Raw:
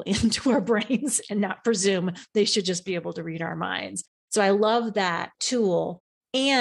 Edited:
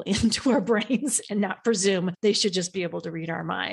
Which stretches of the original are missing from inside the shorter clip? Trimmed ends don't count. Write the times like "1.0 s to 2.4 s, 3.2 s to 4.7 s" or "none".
2.1 s to 2.3 s

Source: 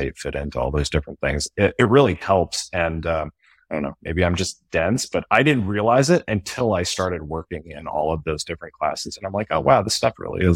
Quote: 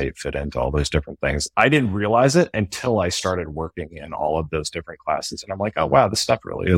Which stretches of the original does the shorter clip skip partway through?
1.5 s to 5.2 s

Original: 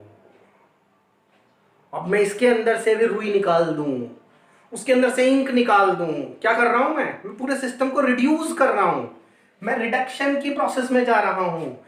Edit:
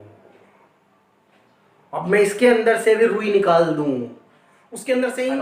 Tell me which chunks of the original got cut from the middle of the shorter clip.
none

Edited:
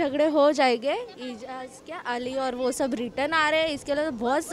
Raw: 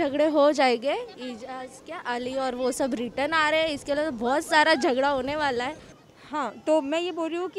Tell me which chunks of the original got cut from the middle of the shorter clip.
none

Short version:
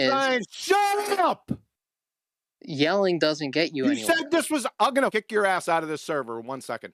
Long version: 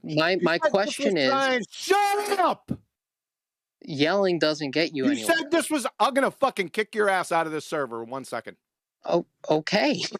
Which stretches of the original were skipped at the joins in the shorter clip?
6.3 s to 6.7 s

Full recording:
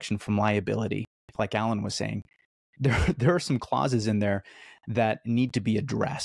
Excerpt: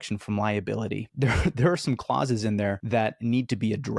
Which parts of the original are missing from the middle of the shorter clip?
1.1 s to 2.7 s, 4.4 s to 4.8 s

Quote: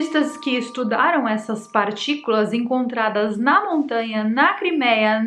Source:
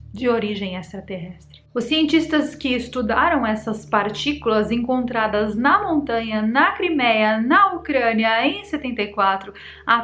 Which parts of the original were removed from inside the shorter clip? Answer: none

